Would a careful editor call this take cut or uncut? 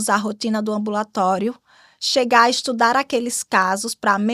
uncut